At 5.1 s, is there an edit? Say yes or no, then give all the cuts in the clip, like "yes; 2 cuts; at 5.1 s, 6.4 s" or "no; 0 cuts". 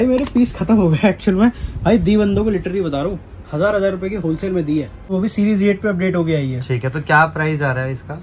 yes; 1 cut; at 5.1 s